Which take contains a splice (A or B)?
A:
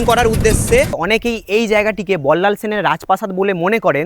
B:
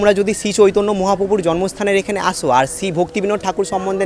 A